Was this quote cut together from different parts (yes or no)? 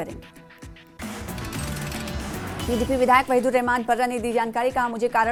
no